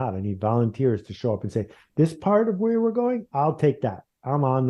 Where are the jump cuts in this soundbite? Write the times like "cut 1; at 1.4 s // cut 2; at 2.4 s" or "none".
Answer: none